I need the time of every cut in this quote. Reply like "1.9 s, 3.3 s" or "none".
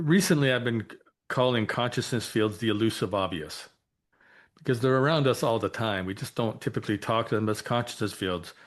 none